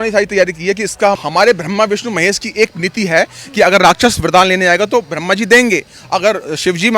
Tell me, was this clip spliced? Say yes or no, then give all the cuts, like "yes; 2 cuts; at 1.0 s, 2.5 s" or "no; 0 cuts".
yes; 1 cut; at 1.2 s